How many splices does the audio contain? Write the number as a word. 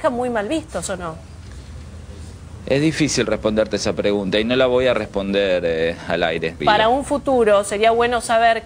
zero